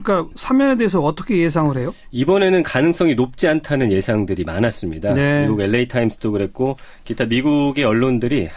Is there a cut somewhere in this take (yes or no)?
yes